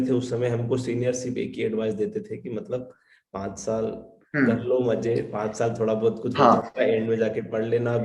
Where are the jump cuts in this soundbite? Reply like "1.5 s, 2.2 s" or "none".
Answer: none